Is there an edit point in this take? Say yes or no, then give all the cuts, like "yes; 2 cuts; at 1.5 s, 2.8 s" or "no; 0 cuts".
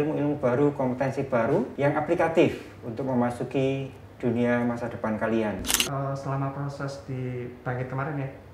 yes; 2 cuts; at 1.7 s, 5.8 s